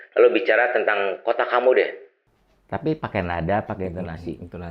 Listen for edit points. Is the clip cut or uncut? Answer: uncut